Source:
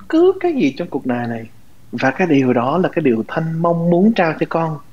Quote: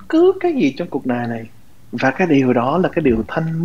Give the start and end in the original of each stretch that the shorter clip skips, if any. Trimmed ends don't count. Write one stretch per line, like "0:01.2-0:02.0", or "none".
none